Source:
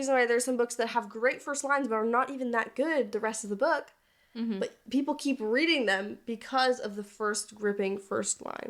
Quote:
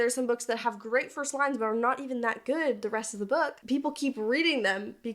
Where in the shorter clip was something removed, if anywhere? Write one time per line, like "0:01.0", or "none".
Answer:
0:03.6